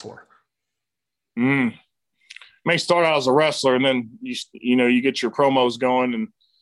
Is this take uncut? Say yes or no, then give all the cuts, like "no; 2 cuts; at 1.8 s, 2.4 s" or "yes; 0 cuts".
yes; 0 cuts